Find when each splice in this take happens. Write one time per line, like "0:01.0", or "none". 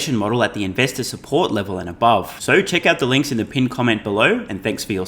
none